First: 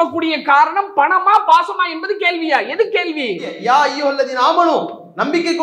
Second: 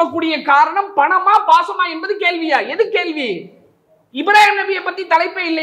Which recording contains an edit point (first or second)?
first